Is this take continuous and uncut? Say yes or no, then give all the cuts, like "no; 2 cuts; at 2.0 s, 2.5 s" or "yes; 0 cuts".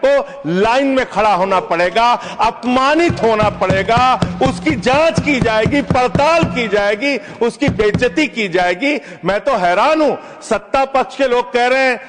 yes; 0 cuts